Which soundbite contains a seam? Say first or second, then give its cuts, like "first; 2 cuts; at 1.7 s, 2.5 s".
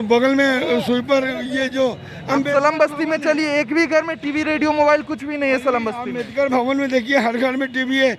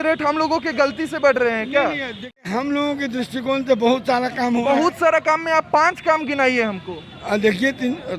second; 1 cut; at 2.5 s